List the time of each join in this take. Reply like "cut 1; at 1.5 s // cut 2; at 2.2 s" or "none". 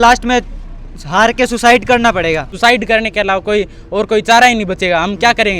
cut 1; at 2.5 s